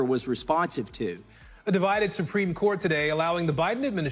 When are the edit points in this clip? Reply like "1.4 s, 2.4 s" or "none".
1.2 s